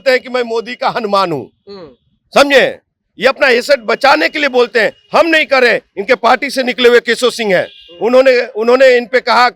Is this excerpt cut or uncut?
uncut